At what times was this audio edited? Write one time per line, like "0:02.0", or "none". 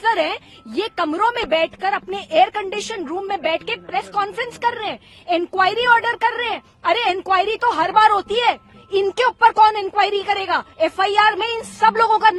none